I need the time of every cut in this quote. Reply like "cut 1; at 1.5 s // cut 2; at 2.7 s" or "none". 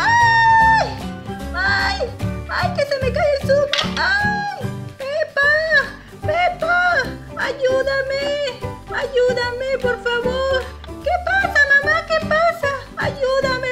cut 1; at 12.8 s

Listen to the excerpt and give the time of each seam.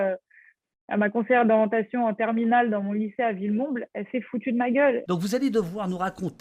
cut 1; at 5.0 s

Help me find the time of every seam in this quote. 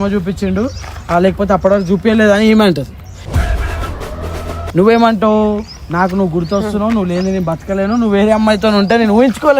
cut 1; at 4.7 s

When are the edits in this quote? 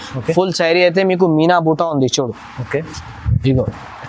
none

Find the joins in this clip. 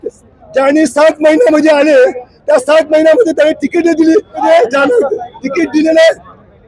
cut 1; at 4.4 s

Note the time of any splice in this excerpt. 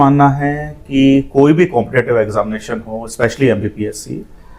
none

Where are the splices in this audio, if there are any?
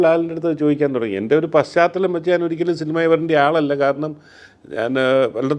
none

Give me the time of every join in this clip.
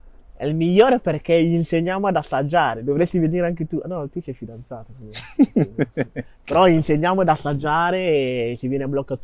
none

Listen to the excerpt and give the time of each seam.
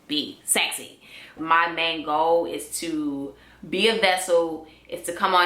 cut 1; at 1.4 s

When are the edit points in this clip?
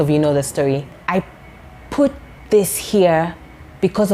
cut 1; at 1.0 s

